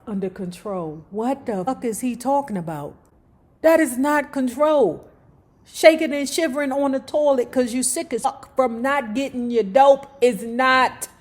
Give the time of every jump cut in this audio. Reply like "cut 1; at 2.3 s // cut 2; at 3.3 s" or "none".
cut 1; at 1.7 s // cut 2; at 8.2 s